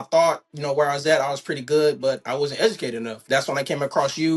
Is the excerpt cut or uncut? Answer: cut